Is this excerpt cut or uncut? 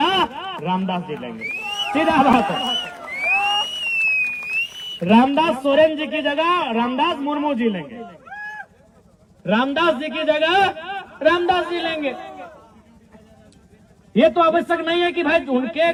uncut